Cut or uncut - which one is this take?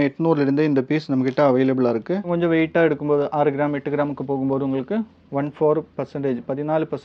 cut